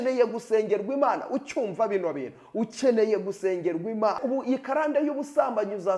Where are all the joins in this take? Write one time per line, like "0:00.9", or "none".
0:04.2